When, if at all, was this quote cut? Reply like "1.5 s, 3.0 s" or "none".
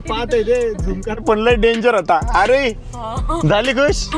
1.2 s